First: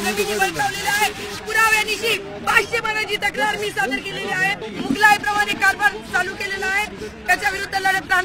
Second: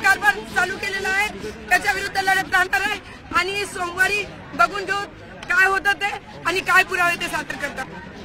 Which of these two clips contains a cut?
first; 1 cut; at 4.6 s

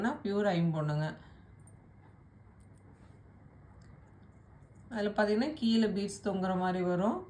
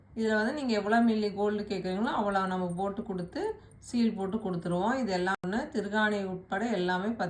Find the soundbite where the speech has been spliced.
second; 1 cut; at 5.4 s

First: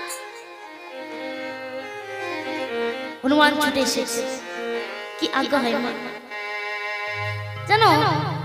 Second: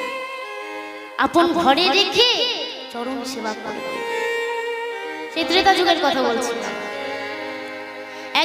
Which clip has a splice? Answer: second; 1 cut; at 5.4 s

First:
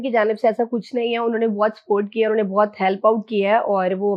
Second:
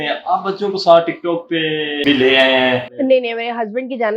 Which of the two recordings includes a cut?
second; 2 cuts; at 2.0 s, 2.9 s

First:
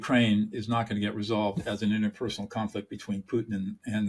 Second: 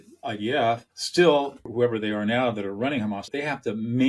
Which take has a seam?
second; 3 cuts; at 0.9 s, 1.7 s, 3.3 s

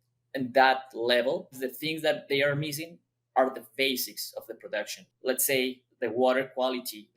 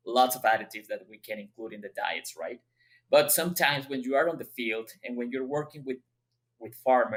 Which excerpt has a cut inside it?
first; 2 cuts; at 1.6 s, 5.1 s

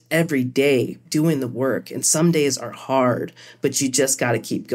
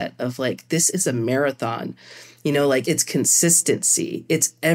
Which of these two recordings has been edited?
second; 1 cut; at 2.8 s

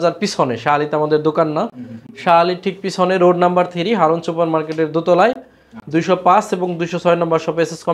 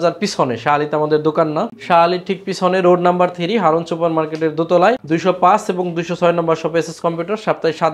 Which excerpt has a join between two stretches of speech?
second; 2 cuts; at 1.8 s, 5.0 s

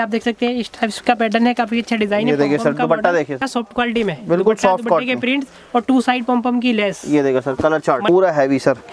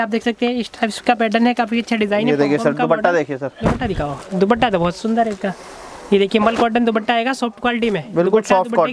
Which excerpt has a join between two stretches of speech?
first; 2 cuts; at 3.4 s, 8.1 s

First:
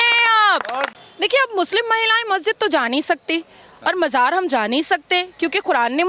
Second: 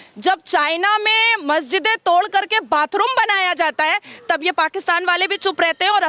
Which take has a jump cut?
first; 1 cut; at 0.9 s

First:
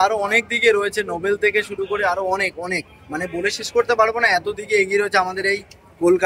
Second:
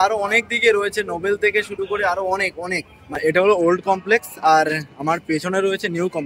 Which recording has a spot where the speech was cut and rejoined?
second; 1 cut; at 3.2 s

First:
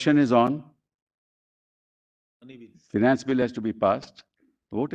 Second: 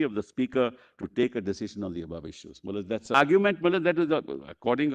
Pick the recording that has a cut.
second; 1 cut; at 3.1 s

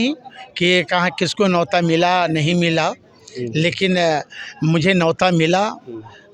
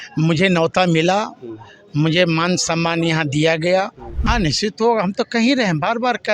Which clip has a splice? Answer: second; 1 cut; at 4.1 s

